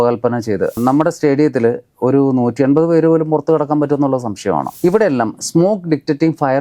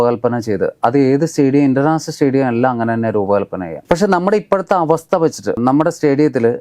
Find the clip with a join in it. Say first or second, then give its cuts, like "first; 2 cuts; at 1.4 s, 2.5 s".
first; 2 cuts; at 0.8 s, 4.7 s